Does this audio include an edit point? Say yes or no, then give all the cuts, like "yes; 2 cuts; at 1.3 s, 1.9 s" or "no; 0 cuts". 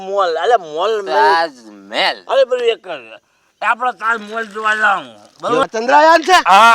yes; 1 cut; at 5.6 s